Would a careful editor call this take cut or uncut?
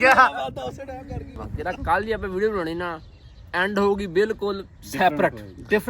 cut